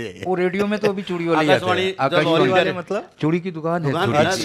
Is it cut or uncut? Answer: uncut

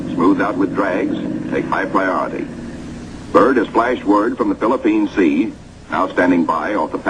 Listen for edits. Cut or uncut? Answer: cut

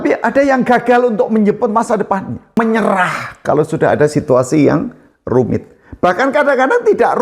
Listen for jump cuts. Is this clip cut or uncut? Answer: cut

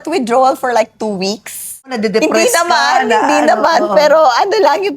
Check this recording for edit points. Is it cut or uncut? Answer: cut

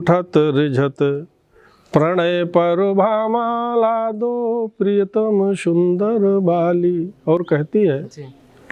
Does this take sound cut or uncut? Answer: uncut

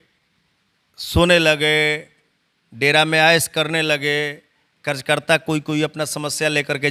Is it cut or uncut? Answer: uncut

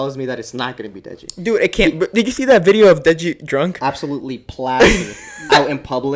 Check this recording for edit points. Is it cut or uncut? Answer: uncut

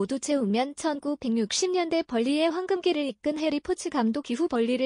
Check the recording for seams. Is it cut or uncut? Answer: uncut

